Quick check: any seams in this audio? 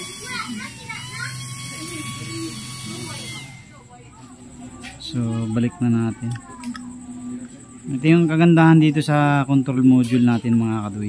no; 0 cuts

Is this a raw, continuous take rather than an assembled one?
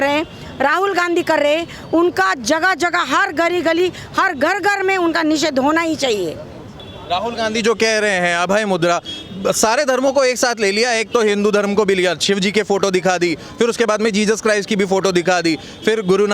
yes; 0 cuts

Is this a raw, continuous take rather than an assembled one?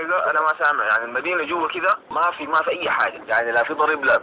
no; 1 cut; at 2.1 s

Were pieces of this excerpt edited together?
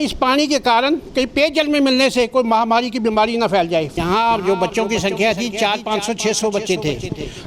yes; 1 cut; at 3.9 s

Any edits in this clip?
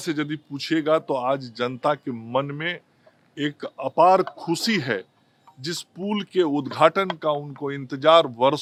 no; 0 cuts

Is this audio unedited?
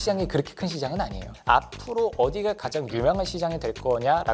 no; 1 cut; at 1.3 s

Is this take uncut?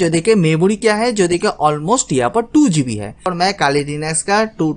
no; 1 cut; at 3.3 s

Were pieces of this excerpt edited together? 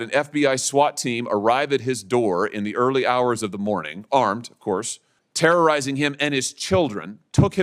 no; 0 cuts

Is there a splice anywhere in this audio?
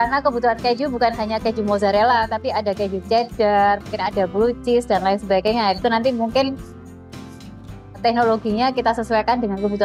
no; 0 cuts

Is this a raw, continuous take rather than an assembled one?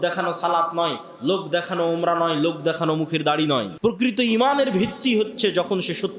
no; 1 cut; at 3.7 s

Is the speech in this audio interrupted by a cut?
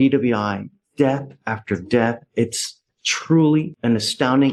no; 0 cuts

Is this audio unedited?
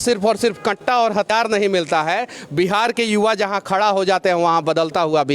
no; 1 cut; at 1.3 s

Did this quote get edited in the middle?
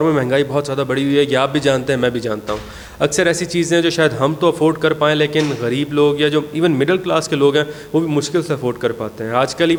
no; 0 cuts

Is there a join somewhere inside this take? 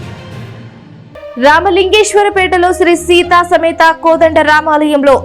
yes; 1 cut; at 0.9 s

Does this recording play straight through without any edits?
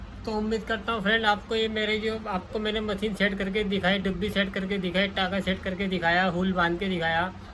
yes; 0 cuts

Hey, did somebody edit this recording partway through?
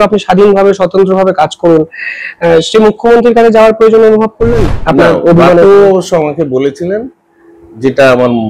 yes; 1 cut; at 4.7 s

